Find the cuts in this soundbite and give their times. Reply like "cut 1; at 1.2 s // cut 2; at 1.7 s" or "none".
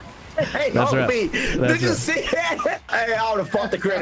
cut 1; at 2.8 s